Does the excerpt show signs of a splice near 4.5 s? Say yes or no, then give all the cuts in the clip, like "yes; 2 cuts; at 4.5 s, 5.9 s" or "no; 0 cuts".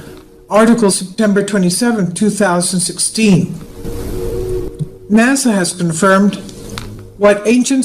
yes; 1 cut; at 4.5 s